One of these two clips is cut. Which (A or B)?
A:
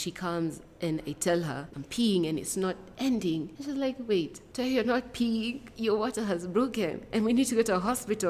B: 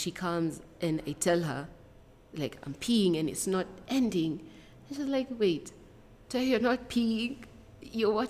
A